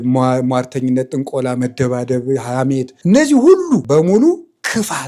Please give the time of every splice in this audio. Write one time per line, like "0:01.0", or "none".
0:02.9
0:03.8

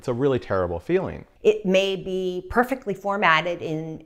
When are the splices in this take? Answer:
0:01.2

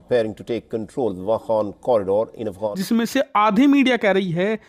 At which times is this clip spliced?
0:02.7

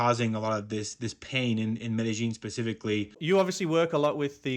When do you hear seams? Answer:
0:03.1

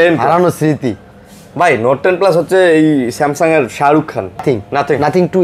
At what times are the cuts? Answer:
0:04.4

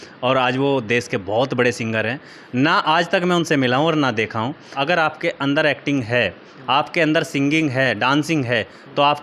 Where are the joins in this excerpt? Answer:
0:04.7

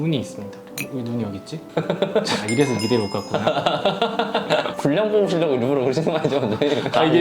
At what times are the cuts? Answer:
none

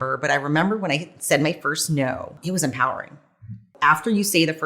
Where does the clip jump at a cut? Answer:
0:02.4
0:03.7

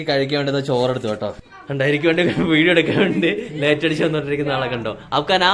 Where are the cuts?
0:01.4

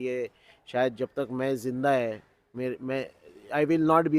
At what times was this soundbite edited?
none

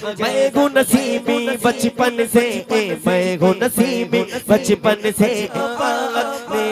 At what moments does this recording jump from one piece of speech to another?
0:05.6

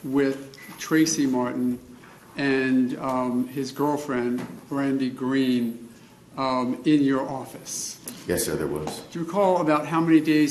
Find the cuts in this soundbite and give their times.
0:05.2

